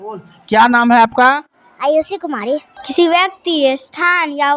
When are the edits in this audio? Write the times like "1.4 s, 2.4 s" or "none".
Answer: 2.8 s

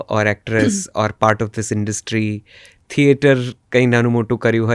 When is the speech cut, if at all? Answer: none

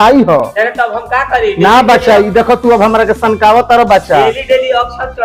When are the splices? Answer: none

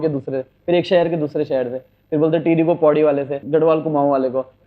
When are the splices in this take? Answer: 3.4 s

